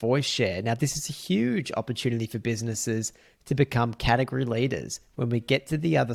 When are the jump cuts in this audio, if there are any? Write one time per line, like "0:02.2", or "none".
none

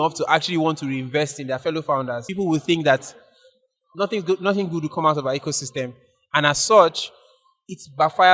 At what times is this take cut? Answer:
0:02.2

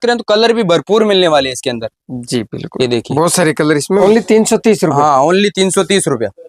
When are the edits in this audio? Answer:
0:04.0

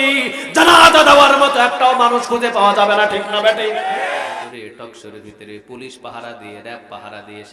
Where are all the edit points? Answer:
0:04.3

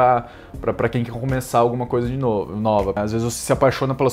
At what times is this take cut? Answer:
0:03.0

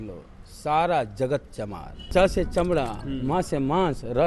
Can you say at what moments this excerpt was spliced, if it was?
0:02.1

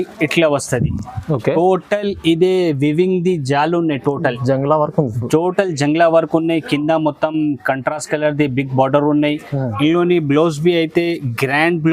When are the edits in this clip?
none

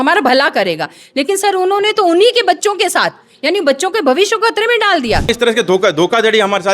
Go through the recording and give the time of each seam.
0:05.3

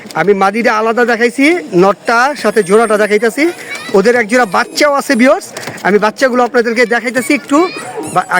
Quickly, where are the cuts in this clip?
none

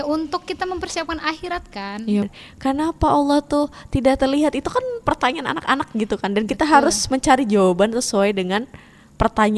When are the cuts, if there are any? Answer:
0:02.2

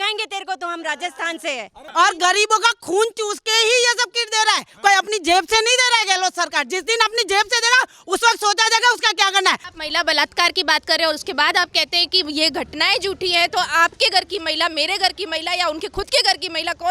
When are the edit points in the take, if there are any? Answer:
0:01.7
0:09.7

